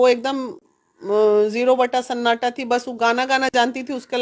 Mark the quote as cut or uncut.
uncut